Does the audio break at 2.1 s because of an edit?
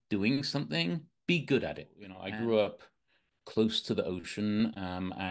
yes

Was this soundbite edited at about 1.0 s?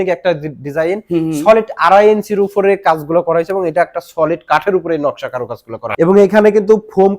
no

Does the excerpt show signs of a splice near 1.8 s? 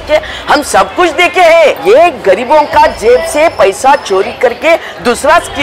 yes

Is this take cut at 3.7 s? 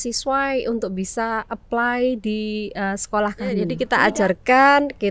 yes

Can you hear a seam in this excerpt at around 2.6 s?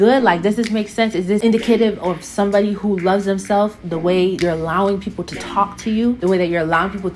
no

